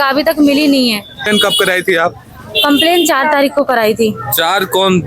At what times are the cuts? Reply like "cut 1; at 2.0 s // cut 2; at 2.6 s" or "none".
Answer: cut 1; at 1.3 s